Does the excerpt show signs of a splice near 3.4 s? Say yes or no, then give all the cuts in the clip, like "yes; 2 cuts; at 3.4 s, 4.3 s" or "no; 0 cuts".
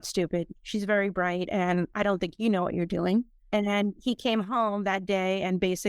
yes; 1 cut; at 3.4 s